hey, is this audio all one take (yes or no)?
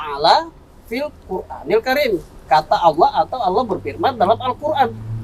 yes